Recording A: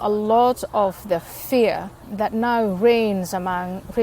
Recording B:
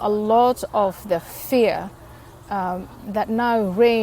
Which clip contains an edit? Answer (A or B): A